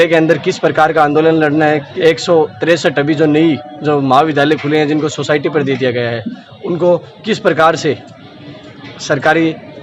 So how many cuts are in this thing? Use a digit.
1